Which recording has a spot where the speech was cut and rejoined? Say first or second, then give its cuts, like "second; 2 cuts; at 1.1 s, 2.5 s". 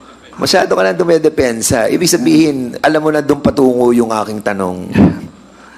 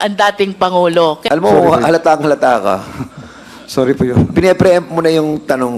second; 1 cut; at 1.2 s